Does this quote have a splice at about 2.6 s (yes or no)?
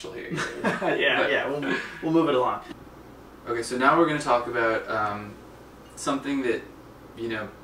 yes